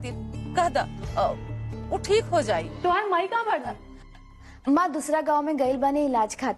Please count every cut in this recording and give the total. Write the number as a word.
one